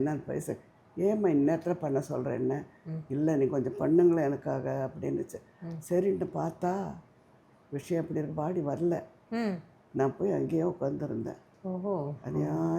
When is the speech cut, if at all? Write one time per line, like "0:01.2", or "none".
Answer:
0:11.4